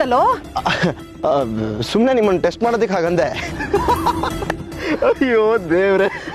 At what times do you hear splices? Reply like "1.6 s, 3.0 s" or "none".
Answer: 3.6 s

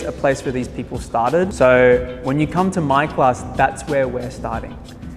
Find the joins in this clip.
1.5 s

